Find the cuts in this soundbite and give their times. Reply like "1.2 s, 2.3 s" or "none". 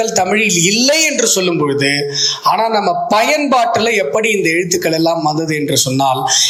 none